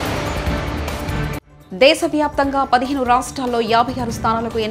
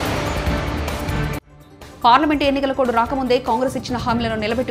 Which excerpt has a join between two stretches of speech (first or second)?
second